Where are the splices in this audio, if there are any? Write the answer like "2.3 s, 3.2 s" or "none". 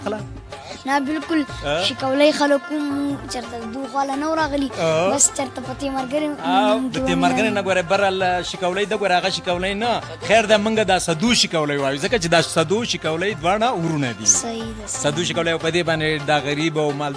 none

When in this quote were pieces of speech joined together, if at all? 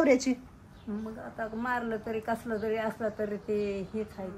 none

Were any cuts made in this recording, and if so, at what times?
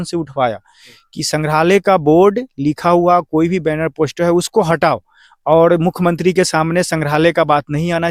none

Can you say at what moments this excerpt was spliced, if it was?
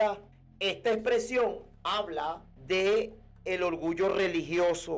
none

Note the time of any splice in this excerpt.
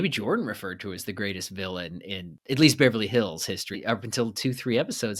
2.3 s, 3.8 s

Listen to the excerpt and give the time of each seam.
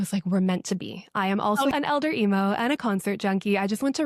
1.7 s

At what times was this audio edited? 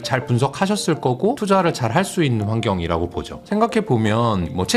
1.4 s

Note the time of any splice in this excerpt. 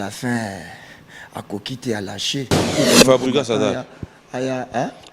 2.7 s

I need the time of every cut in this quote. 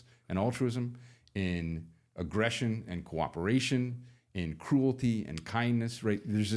none

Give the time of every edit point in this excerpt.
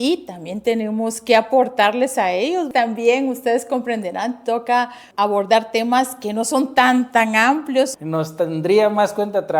2.7 s, 5.0 s, 7.9 s

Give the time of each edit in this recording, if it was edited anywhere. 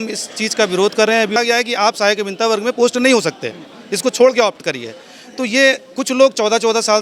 1.4 s

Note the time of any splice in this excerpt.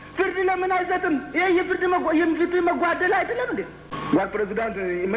3.9 s

